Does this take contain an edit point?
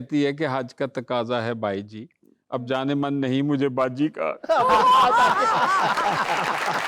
no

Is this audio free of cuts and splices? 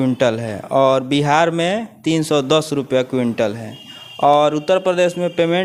yes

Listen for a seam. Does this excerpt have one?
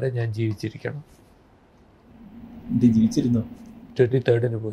no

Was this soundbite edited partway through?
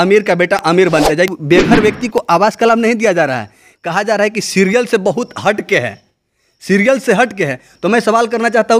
yes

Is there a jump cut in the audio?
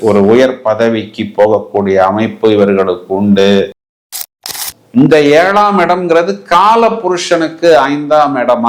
yes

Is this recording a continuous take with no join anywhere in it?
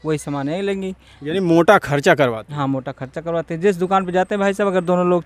yes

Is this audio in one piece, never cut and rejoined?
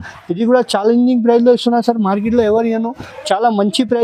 yes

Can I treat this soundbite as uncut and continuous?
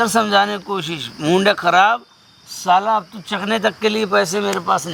yes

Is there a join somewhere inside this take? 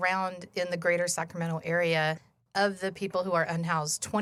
no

